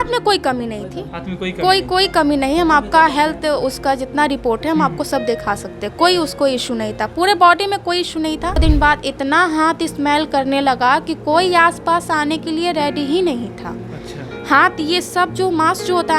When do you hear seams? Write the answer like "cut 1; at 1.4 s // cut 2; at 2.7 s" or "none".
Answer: cut 1; at 8.6 s